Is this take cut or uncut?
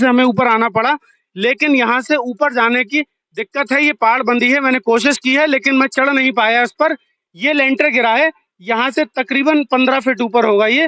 uncut